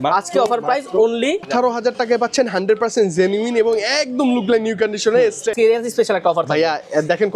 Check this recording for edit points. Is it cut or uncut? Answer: cut